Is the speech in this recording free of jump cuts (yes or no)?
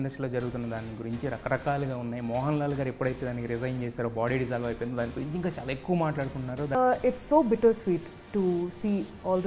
no